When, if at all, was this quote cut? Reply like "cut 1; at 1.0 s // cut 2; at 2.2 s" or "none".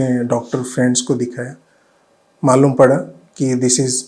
cut 1; at 2.3 s